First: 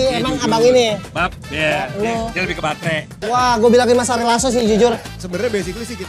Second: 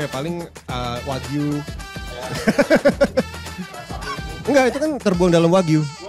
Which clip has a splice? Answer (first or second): first